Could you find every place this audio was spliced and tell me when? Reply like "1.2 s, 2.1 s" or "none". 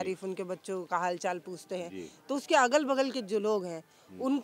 none